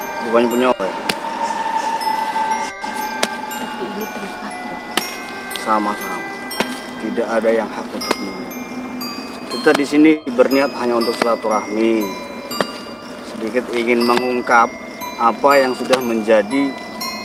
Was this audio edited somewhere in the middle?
no; 0 cuts

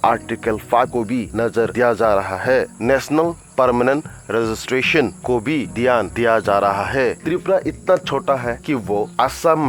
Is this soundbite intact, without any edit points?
no; 1 cut; at 7.2 s

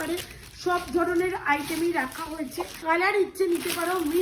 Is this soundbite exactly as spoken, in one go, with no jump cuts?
no; 1 cut; at 2.8 s

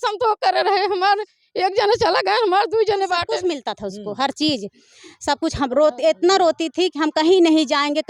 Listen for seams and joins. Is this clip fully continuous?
no; 1 cut; at 3.3 s

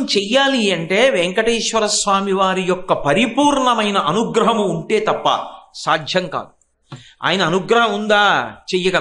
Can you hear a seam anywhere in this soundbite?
no; 0 cuts

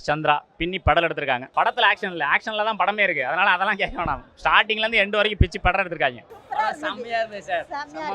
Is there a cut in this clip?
yes; 2 cuts; at 1.4 s, 6.3 s

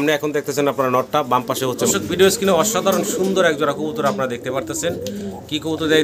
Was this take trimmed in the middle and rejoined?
yes; 1 cut; at 1.9 s

